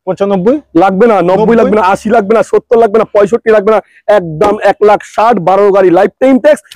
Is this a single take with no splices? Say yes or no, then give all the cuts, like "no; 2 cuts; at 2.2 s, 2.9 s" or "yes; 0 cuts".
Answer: yes; 0 cuts